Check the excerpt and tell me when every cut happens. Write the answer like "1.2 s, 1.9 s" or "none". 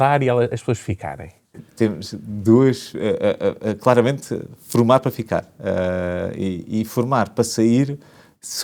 none